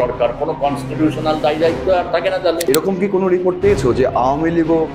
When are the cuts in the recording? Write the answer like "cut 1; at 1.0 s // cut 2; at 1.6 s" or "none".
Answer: cut 1; at 2.6 s